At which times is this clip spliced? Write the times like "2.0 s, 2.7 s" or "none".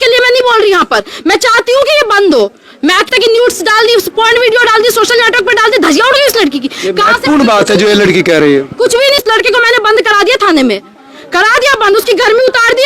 3.1 s, 9.2 s